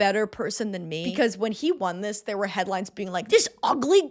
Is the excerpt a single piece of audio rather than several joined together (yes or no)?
no